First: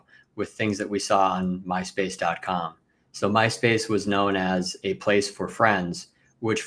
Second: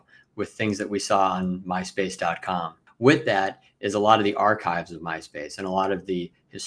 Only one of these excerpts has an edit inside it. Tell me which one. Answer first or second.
second